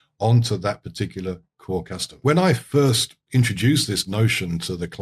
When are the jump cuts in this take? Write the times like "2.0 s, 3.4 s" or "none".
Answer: 2.2 s